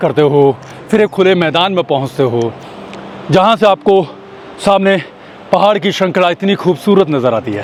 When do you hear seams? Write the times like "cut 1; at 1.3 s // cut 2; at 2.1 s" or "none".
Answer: none